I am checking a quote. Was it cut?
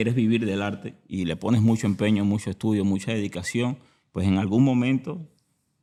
no; 0 cuts

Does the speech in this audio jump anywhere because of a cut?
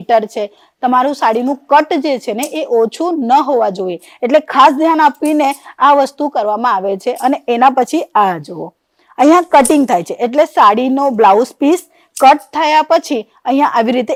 no; 0 cuts

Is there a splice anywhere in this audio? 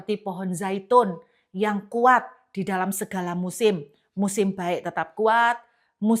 no; 0 cuts

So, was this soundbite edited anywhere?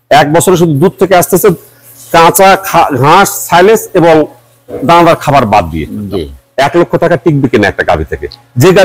yes; 1 cut; at 6.4 s

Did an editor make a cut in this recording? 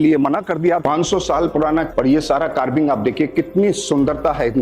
yes; 2 cuts; at 0.8 s, 1.9 s

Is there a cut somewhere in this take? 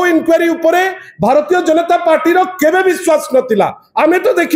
no; 0 cuts

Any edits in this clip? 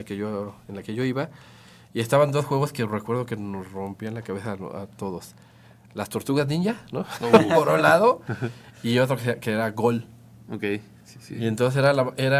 no; 0 cuts

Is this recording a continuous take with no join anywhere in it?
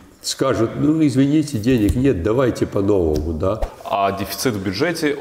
no; 1 cut; at 3.7 s

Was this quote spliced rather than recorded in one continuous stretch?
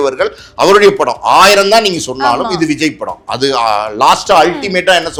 no; 0 cuts

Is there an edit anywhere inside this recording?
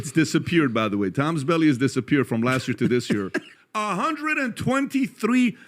yes; 1 cut; at 3.5 s

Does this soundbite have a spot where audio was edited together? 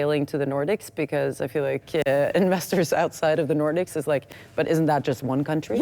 no; 0 cuts

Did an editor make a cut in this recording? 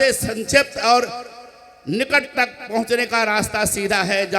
no; 0 cuts

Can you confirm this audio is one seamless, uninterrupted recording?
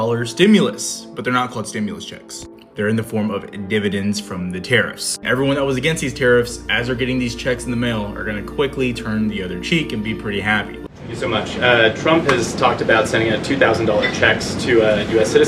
no; 2 cuts; at 5.2 s, 10.8 s

